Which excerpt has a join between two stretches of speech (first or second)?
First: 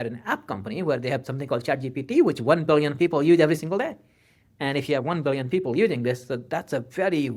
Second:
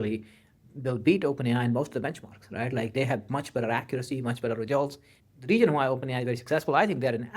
second